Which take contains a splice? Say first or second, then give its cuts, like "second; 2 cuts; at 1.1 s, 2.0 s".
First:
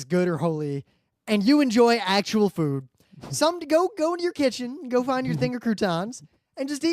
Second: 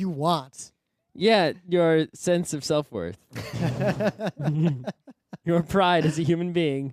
first; 1 cut; at 3.9 s